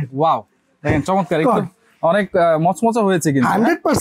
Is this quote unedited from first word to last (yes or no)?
yes